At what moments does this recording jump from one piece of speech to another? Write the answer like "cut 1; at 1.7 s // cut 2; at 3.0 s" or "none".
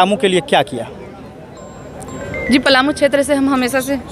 none